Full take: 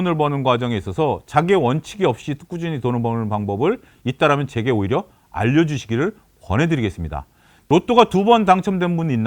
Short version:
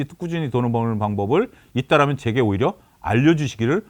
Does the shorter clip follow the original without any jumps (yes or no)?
yes